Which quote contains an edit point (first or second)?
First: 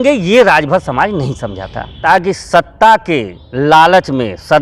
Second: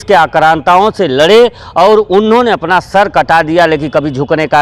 first